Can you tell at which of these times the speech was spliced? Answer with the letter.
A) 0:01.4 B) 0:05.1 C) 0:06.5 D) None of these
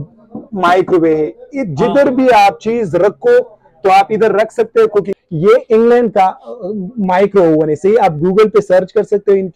B